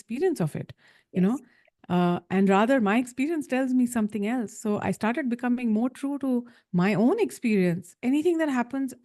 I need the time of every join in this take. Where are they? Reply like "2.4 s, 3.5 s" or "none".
7.9 s